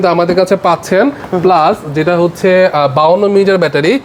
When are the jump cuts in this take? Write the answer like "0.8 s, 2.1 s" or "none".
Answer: none